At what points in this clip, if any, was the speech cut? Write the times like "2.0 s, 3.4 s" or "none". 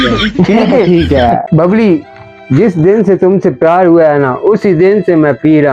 1.4 s